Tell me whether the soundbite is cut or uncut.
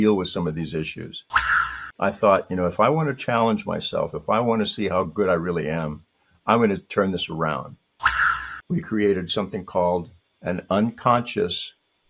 cut